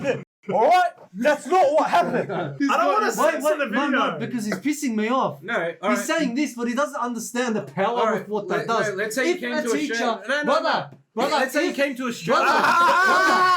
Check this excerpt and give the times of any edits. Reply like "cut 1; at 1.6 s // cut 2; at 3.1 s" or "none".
cut 1; at 2.5 s

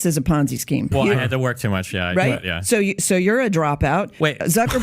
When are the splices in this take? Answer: cut 1; at 0.9 s

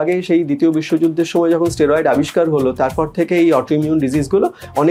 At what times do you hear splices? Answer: none

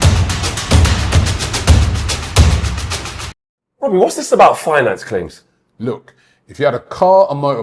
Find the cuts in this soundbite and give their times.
cut 1; at 3.8 s

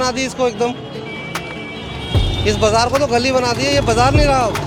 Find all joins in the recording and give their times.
none

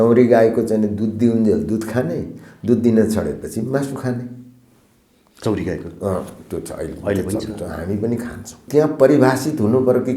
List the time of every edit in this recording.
cut 1; at 8.6 s

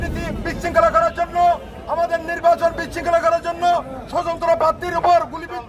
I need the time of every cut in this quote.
none

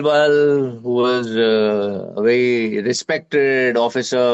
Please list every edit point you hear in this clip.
none

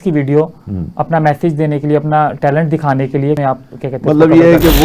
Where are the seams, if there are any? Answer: cut 1; at 3.4 s

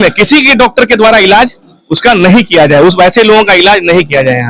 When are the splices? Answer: none

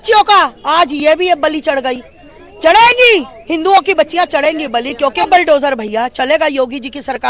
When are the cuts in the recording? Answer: cut 1; at 5.3 s

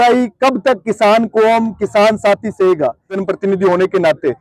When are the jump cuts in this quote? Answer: cut 1; at 3.2 s

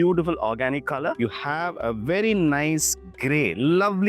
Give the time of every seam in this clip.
cut 1; at 1.2 s

